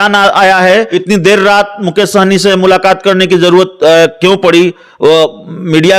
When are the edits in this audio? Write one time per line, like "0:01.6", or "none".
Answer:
0:00.9